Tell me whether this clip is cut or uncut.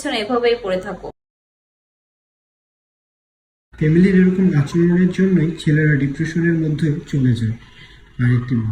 uncut